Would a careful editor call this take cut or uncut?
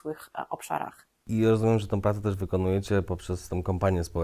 cut